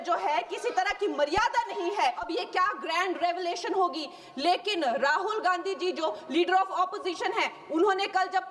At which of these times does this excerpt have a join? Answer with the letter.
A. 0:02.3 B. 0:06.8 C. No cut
A